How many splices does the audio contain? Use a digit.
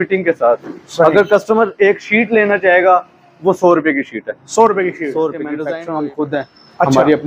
1